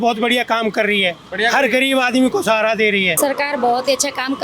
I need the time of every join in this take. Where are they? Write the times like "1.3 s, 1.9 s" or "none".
3.2 s